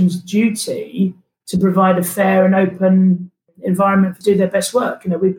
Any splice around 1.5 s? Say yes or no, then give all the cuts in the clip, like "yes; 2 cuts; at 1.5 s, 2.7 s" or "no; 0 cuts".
no; 1 cut; at 4.2 s